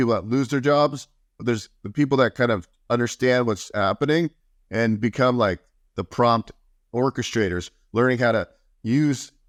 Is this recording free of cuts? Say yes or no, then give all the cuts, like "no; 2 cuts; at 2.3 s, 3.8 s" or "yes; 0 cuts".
yes; 0 cuts